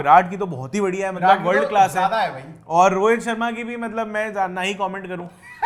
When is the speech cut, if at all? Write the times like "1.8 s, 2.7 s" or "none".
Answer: none